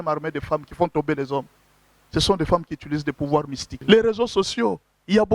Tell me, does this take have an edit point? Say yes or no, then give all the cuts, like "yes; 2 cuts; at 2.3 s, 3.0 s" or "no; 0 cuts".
yes; 1 cut; at 3.7 s